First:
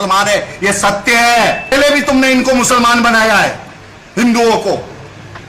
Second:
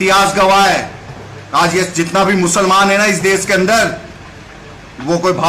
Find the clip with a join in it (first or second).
first